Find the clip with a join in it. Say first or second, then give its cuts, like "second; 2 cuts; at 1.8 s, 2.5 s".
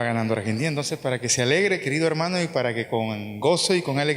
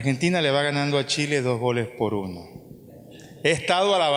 first; 1 cut; at 3.0 s